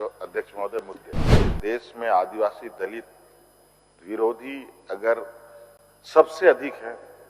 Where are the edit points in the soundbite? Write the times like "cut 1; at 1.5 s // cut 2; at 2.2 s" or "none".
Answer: cut 1; at 1.4 s